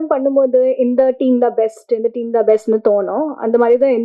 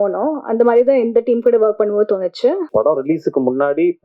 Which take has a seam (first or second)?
second